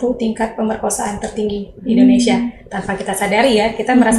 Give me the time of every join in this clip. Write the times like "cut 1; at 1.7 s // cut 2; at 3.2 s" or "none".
none